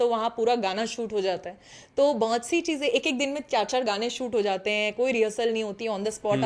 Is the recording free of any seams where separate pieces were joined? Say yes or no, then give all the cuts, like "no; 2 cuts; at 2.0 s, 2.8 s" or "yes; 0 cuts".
yes; 0 cuts